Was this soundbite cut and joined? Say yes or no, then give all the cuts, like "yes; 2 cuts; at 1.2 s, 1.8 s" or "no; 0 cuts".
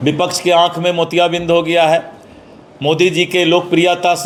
no; 0 cuts